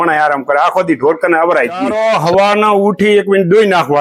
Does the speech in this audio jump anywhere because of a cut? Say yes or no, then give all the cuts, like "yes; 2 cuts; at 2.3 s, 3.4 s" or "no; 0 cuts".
yes; 1 cut; at 2.0 s